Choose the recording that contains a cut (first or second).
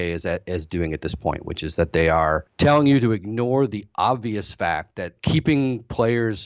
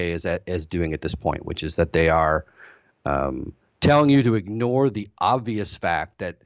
first